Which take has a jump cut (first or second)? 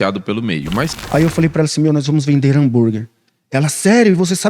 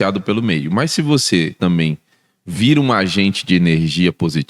first